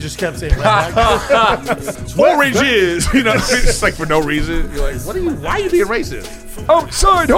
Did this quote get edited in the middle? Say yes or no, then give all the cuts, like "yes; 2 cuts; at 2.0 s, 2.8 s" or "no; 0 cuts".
yes; 1 cut; at 2.0 s